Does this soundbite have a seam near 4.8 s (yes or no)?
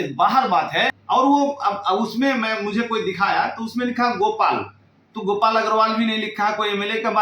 no